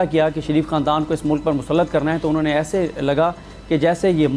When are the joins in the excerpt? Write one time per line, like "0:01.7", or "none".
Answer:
none